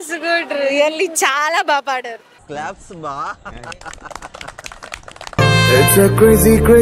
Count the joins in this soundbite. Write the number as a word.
one